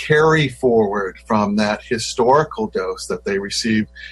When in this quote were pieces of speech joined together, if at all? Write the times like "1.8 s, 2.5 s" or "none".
none